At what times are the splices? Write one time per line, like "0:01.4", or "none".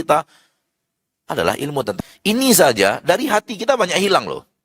0:02.0

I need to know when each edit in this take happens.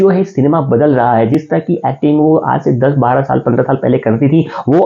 none

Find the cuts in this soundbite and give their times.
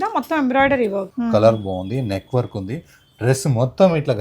0:01.1

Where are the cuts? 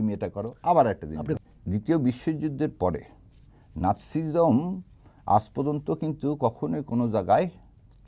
0:01.3

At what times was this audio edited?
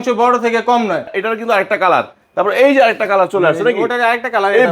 0:01.1

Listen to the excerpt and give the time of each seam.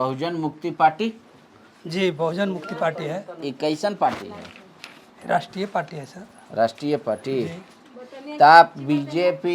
none

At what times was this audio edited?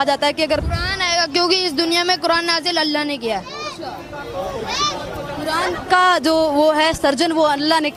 none

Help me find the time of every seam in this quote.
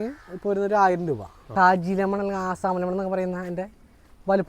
0:01.5

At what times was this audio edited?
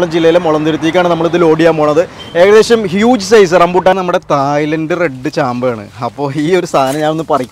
0:04.0

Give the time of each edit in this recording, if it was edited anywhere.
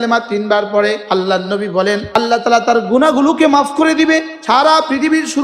0:01.0
0:02.1
0:04.3

